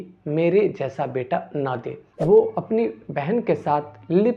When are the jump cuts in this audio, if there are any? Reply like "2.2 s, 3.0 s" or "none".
2.0 s